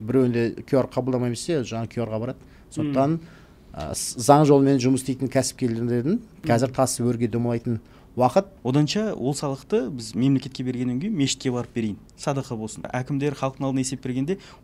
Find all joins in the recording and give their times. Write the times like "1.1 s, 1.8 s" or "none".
8.5 s, 12.9 s